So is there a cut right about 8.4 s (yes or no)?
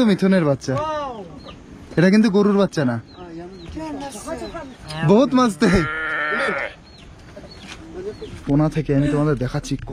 yes